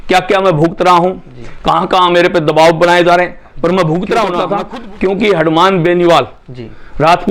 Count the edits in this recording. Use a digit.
1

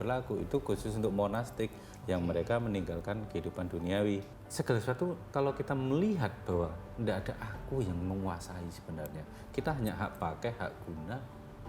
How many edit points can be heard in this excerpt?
1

